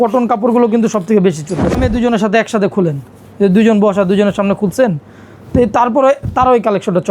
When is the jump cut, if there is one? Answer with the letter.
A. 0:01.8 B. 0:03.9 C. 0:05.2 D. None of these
A